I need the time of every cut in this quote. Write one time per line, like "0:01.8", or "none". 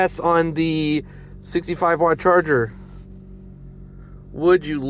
none